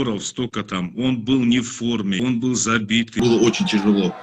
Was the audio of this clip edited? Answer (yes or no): yes